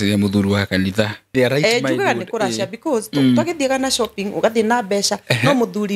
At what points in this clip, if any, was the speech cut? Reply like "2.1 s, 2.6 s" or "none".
1.3 s